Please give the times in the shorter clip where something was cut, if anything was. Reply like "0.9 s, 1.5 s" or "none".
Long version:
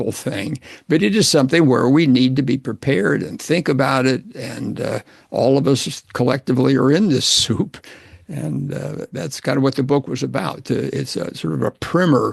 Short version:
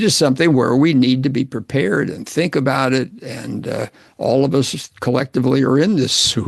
none